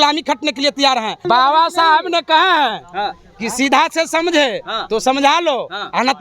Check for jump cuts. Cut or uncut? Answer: cut